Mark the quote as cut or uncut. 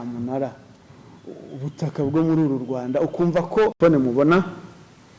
uncut